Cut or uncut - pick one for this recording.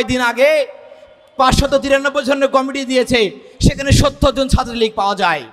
uncut